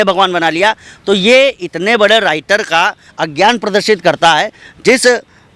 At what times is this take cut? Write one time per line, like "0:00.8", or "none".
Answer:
none